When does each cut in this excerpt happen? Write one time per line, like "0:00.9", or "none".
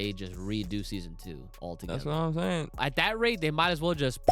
0:02.8